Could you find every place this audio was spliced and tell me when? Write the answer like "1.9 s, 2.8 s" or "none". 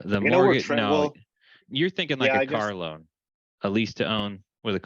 1.7 s